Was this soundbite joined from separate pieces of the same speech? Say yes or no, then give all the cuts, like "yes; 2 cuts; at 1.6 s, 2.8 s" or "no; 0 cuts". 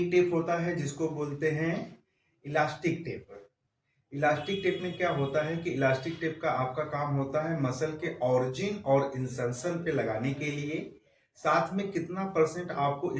no; 0 cuts